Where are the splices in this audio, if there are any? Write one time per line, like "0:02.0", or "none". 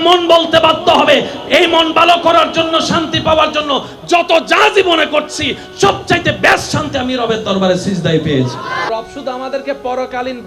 0:08.9